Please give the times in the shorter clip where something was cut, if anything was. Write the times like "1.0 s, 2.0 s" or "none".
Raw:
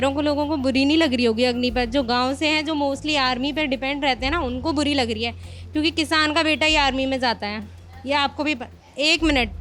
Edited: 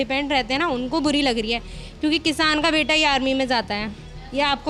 none